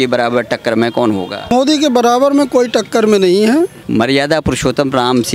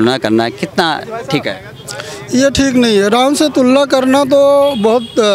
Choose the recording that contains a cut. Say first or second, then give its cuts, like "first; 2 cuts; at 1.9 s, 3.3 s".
first; 2 cuts; at 1.5 s, 3.8 s